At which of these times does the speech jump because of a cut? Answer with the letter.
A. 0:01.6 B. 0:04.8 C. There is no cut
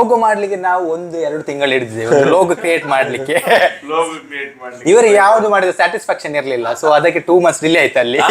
C